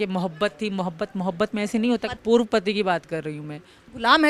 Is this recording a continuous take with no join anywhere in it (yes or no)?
yes